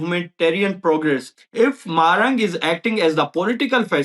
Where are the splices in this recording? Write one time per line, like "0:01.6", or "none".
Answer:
0:01.4

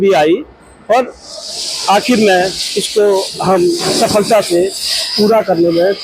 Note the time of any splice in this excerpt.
none

